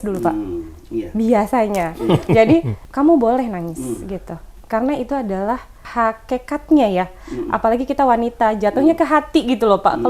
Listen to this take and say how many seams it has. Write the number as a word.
two